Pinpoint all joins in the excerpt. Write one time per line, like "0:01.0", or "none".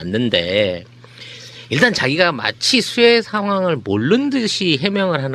0:01.6